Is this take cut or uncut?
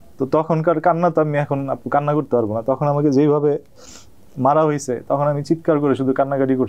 uncut